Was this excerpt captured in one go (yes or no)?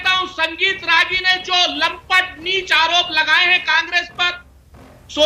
yes